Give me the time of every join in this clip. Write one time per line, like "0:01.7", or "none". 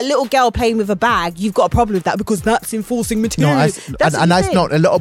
none